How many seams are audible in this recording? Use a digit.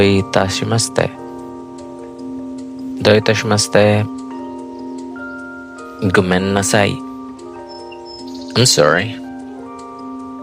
6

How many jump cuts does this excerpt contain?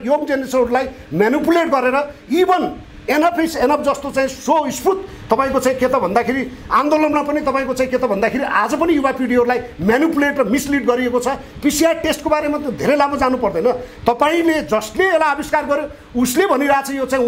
0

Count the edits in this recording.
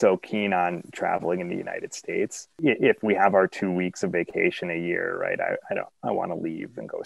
1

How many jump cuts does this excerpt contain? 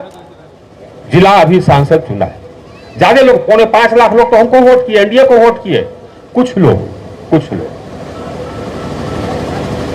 0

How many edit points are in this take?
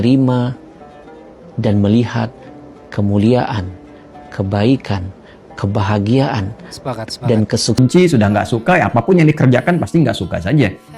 1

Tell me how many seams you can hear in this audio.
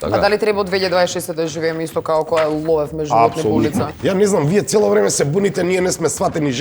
1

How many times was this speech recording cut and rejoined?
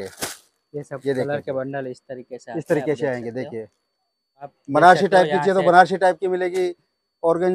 1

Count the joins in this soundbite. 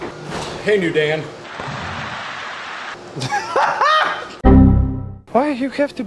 0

